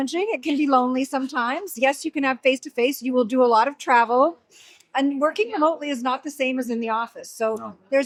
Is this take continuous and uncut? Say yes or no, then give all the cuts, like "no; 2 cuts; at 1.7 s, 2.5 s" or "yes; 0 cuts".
yes; 0 cuts